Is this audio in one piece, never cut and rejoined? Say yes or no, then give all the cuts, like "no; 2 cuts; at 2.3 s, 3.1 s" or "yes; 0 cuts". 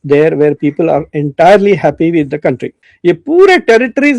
no; 1 cut; at 2.8 s